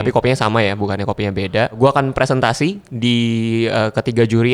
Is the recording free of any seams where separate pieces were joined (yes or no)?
no